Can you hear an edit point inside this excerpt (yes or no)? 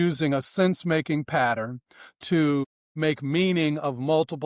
no